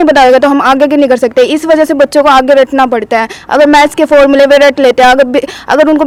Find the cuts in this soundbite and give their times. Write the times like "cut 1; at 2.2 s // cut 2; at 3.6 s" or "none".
none